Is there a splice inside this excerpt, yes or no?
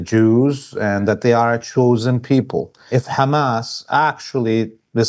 yes